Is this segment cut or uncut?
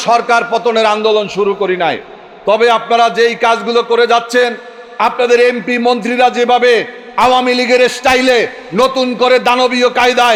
uncut